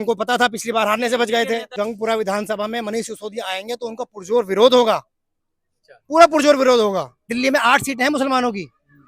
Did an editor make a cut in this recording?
yes; 2 cuts; at 1.7 s, 7.2 s

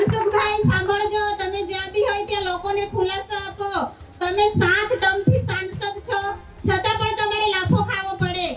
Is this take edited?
no; 0 cuts

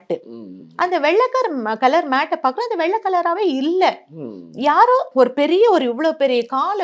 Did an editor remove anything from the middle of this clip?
no; 0 cuts

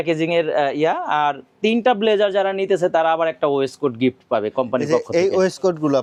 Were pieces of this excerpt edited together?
no; 0 cuts

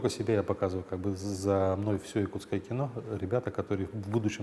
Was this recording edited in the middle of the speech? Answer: no; 0 cuts

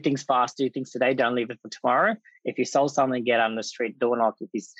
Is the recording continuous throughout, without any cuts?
yes; 0 cuts

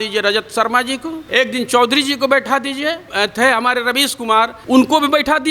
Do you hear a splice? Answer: yes; 3 cuts; at 1.2 s, 3.1 s, 4.6 s

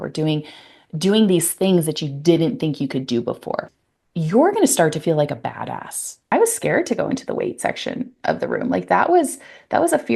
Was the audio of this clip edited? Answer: yes; 2 cuts; at 3.6 s, 6.2 s

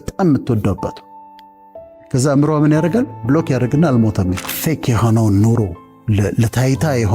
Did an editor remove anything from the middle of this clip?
yes; 1 cut; at 4.5 s

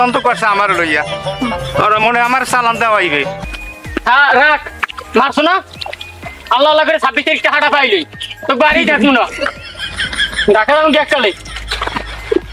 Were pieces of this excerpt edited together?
yes; 1 cut; at 3.4 s

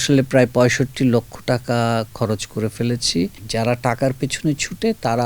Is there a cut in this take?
yes; 1 cut; at 3.4 s

